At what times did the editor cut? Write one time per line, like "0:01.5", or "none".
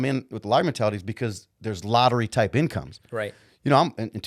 none